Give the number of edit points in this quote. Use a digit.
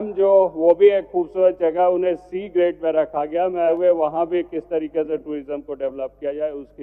1